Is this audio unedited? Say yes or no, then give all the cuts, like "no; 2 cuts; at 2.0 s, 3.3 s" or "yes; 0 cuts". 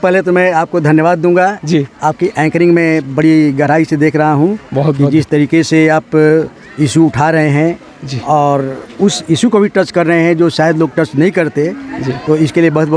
yes; 0 cuts